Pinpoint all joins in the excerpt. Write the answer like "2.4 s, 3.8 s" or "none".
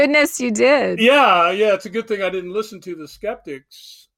0.9 s